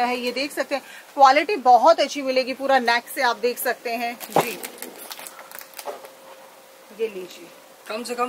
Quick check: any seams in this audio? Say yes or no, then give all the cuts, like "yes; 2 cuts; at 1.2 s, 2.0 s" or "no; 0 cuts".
no; 0 cuts